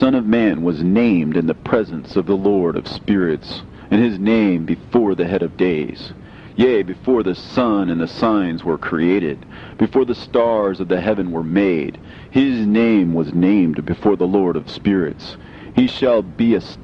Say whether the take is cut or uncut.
uncut